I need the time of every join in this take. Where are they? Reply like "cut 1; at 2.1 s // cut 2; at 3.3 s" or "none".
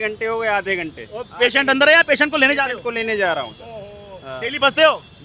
none